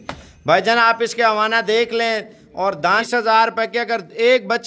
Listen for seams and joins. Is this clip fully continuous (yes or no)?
no